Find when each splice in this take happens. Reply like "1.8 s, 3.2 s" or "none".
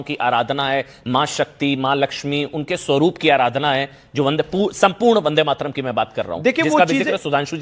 6.2 s